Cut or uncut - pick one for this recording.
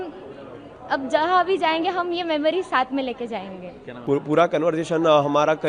uncut